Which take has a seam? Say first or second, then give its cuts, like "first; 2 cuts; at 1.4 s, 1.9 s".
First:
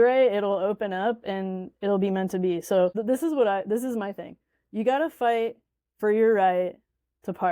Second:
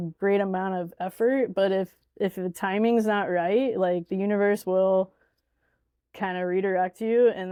first; 1 cut; at 2.9 s